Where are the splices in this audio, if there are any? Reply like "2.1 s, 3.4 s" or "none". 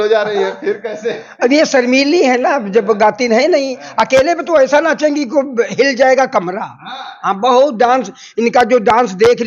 none